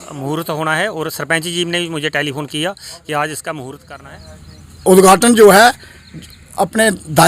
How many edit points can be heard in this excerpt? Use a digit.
1